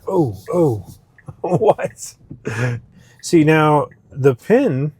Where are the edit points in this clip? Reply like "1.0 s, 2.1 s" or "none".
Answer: 2.9 s